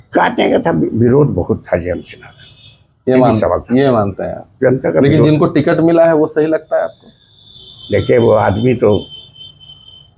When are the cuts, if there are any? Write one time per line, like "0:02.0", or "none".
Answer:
none